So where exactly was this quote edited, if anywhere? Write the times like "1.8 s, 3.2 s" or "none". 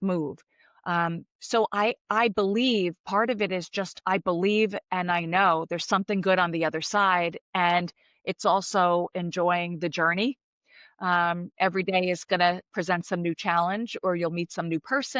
none